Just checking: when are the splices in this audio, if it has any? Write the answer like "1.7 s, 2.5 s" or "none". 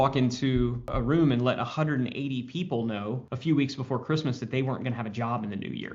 0.9 s, 3.3 s